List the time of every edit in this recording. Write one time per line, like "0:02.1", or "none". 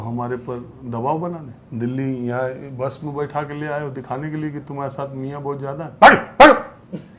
0:01.6